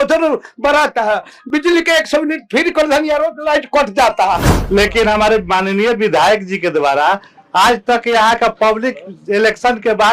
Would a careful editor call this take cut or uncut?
cut